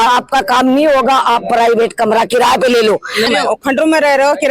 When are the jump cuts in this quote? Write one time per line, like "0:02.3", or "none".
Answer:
0:03.3